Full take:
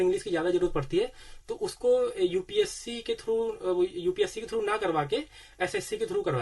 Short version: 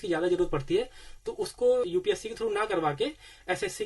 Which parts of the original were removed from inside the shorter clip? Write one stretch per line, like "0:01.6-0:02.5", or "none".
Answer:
0:02.1-0:04.0